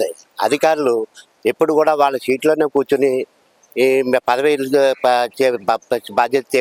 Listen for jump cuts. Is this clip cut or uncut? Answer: uncut